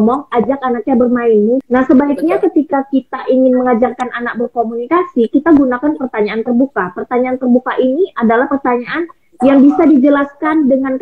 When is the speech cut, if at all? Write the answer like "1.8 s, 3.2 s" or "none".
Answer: 1.6 s